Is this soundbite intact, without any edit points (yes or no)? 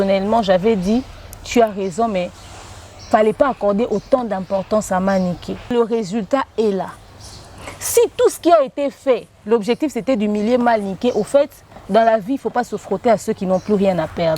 no